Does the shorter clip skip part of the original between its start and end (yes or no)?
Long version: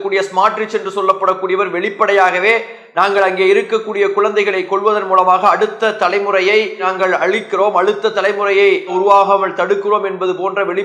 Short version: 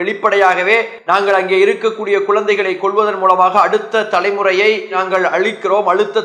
yes